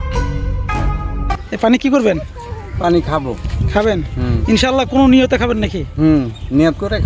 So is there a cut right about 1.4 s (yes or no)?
yes